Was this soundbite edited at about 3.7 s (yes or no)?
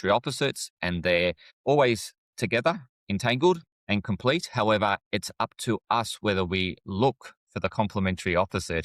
yes